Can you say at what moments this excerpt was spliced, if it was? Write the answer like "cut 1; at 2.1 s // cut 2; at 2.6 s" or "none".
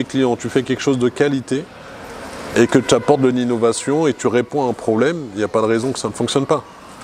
none